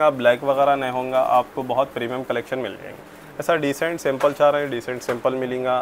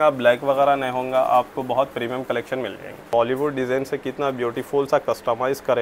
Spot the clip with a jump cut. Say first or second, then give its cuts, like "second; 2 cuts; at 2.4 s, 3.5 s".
second; 1 cut; at 3.1 s